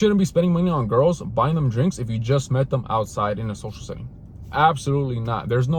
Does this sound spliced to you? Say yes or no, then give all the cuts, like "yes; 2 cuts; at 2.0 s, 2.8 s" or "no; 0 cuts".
no; 0 cuts